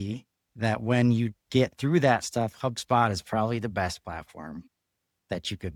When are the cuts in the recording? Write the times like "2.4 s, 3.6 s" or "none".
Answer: none